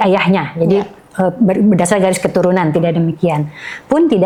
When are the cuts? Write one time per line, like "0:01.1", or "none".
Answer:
none

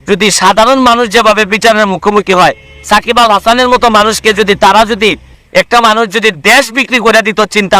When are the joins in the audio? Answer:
0:05.3

